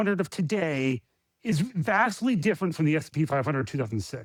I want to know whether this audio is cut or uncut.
uncut